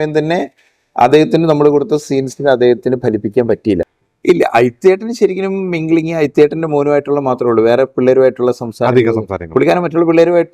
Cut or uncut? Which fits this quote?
cut